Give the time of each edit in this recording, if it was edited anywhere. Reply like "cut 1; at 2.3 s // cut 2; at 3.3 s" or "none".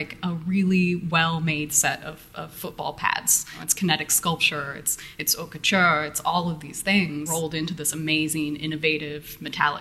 cut 1; at 3.6 s // cut 2; at 7.3 s